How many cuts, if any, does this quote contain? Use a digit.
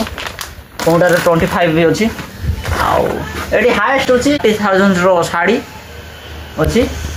1